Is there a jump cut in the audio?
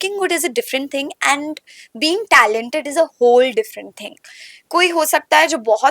no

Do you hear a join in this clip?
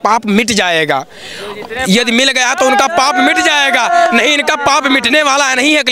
no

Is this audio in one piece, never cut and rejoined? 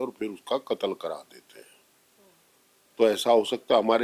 yes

